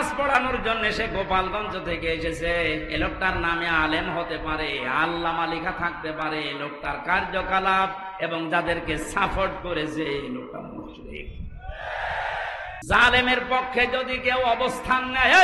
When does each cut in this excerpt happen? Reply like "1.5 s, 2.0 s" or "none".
12.8 s